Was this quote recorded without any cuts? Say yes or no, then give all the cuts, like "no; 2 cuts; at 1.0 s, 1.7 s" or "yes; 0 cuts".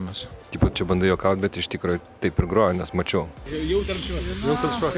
no; 1 cut; at 3.5 s